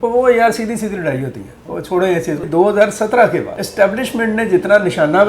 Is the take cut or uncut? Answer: cut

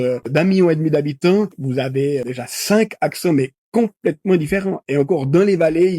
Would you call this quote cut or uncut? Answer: cut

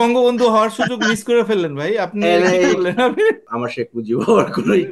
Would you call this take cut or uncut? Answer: cut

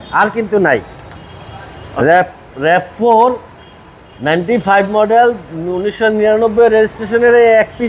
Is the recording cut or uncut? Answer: uncut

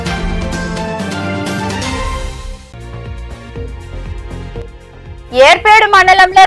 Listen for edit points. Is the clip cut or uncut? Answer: uncut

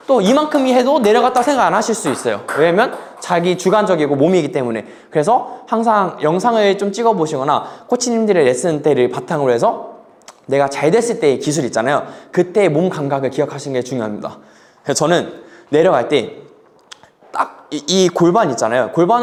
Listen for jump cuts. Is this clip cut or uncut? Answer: uncut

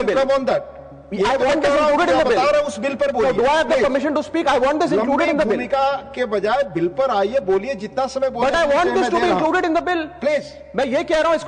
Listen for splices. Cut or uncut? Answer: uncut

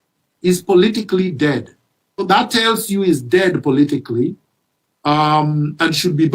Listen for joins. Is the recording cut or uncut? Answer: cut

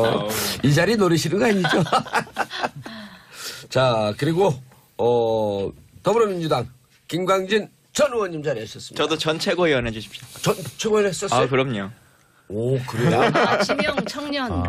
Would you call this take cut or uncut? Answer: uncut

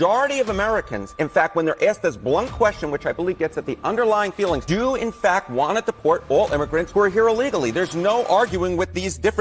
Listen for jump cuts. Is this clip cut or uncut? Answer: uncut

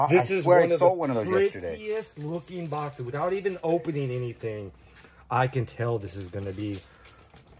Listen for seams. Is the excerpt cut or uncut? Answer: uncut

